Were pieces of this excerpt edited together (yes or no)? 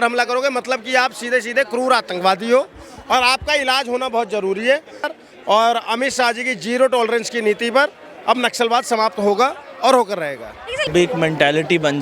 yes